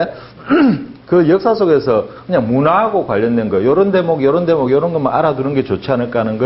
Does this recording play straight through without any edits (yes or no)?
no